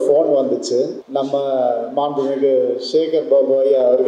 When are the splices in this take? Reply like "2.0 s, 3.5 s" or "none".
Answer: 1.0 s